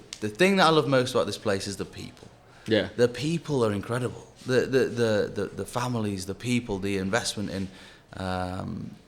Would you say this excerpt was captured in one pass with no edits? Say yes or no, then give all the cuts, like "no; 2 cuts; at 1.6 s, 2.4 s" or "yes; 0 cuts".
yes; 0 cuts